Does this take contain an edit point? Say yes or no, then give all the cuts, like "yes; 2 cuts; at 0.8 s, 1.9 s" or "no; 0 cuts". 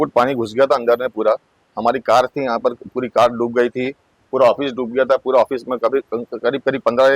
no; 0 cuts